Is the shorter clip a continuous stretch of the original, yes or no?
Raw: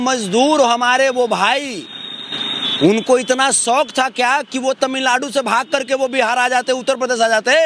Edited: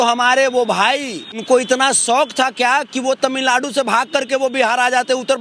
no